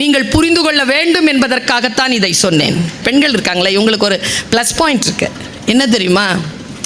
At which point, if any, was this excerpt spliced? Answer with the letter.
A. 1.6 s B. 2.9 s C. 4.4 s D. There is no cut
D